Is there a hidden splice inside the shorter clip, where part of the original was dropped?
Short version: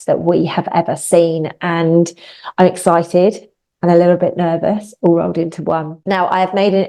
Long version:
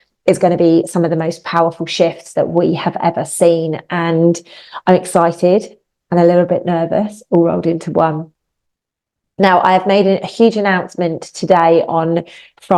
yes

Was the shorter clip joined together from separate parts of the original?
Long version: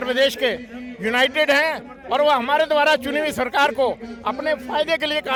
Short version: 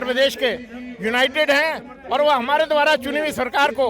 no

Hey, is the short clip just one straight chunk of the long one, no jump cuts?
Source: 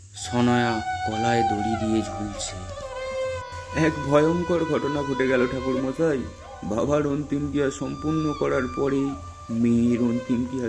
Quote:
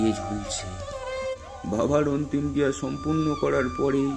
no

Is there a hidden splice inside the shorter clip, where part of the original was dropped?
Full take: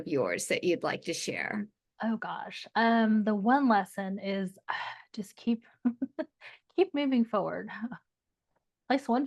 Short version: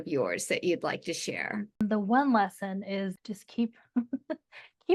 yes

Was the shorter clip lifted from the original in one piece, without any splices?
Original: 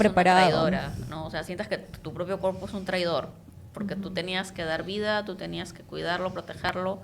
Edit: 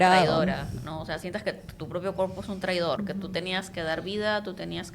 no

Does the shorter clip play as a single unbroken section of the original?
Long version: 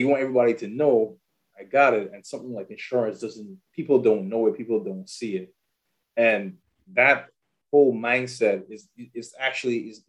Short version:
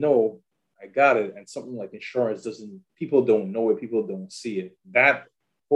no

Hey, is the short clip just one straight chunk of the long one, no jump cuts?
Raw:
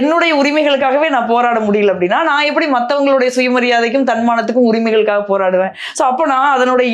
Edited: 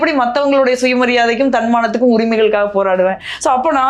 yes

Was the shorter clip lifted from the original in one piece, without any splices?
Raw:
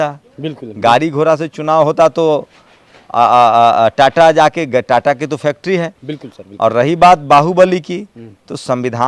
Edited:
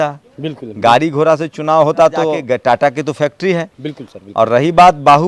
no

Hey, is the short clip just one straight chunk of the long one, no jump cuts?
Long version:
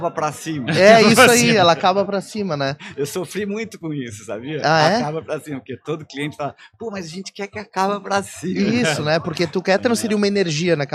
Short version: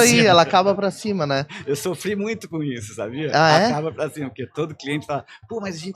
yes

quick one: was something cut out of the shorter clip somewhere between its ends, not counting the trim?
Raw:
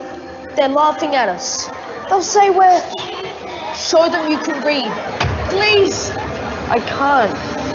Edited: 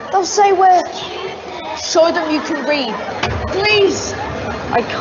no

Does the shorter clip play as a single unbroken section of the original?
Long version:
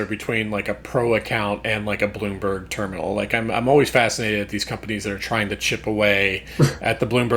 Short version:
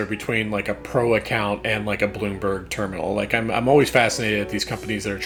yes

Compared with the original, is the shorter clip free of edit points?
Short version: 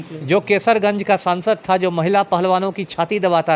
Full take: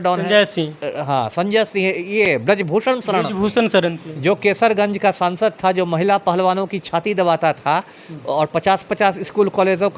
yes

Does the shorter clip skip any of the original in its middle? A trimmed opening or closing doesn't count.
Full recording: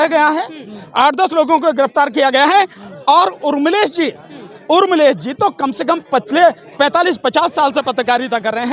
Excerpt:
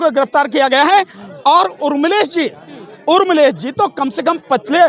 no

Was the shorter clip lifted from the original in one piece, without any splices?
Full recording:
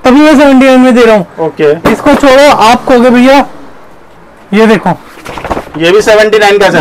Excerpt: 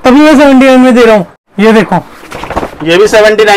no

